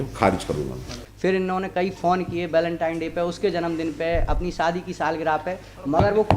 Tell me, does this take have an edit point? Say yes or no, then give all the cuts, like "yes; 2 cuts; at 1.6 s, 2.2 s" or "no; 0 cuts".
yes; 1 cut; at 1.2 s